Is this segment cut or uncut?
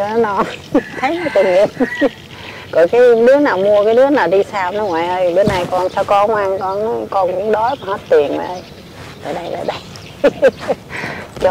uncut